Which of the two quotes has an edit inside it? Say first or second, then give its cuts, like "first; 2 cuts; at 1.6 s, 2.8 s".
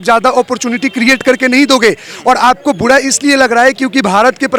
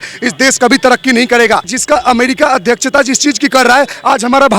second; 1 cut; at 1.7 s